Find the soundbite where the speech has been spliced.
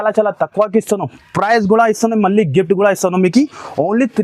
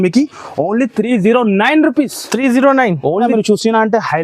second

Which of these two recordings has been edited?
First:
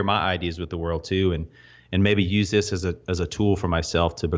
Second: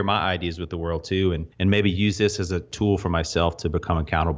second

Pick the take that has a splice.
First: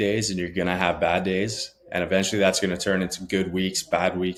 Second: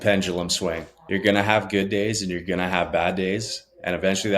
second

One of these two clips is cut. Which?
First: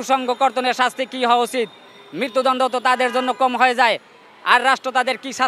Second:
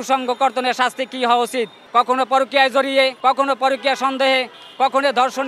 second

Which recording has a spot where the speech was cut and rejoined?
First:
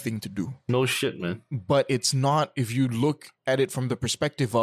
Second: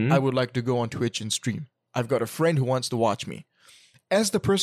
first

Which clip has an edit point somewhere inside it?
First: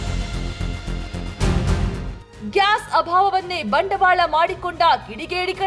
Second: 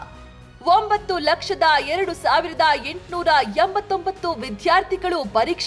first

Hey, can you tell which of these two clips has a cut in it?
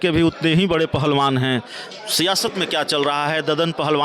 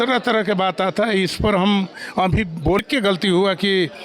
second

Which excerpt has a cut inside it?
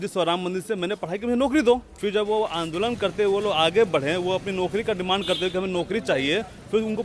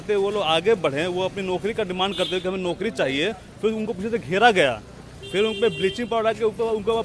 first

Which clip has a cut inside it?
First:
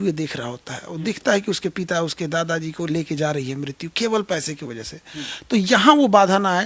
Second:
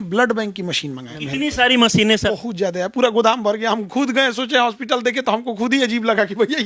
second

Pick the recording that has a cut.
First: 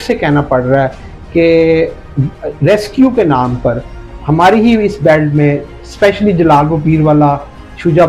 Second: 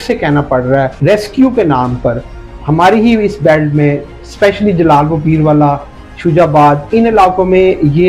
second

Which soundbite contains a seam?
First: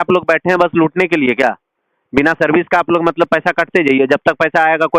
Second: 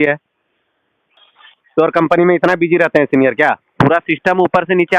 second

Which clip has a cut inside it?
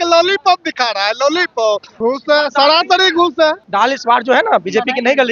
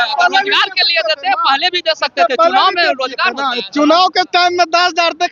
first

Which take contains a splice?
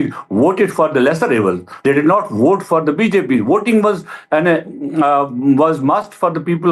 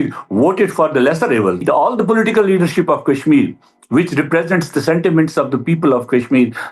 second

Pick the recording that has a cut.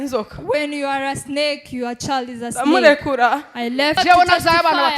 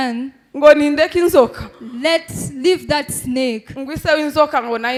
first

